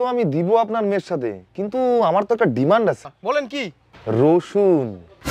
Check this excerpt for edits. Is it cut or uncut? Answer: cut